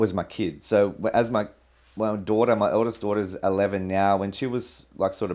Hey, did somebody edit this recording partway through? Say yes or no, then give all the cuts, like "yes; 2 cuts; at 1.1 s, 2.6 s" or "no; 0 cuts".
no; 0 cuts